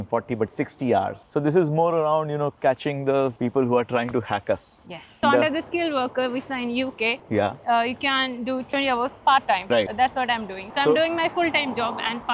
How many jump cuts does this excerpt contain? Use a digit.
2